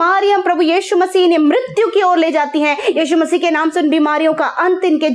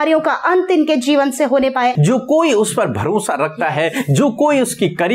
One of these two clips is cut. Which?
second; 1 cut; at 1.9 s

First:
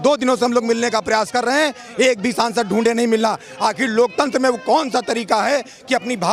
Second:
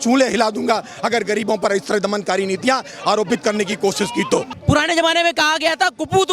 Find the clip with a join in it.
second; 1 cut; at 4.5 s

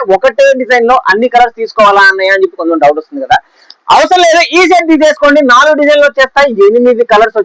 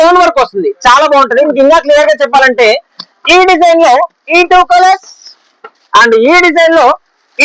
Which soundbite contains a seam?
second; 1 cut; at 1.5 s

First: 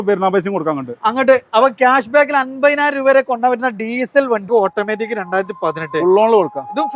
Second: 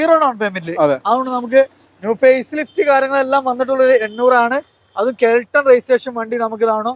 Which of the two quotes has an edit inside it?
first; 1 cut; at 4.5 s

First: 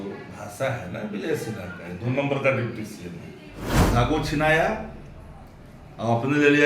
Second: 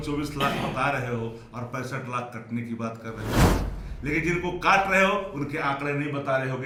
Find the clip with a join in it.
first; 1 cut; at 3.9 s

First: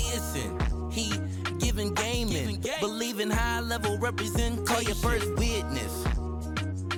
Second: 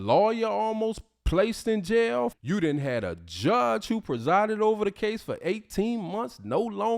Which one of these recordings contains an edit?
second; 1 cut; at 2.4 s

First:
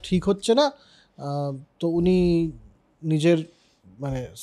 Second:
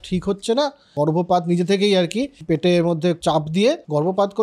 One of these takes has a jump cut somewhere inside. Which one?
second; 3 cuts; at 0.9 s, 2.4 s, 3.6 s

